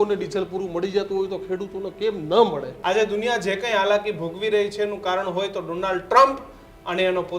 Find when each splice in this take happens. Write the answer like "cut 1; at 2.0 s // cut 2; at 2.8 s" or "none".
cut 1; at 2.7 s